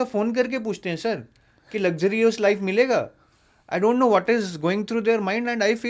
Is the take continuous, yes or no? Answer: yes